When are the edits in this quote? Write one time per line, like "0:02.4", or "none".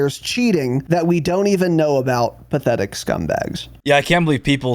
0:00.8
0:03.7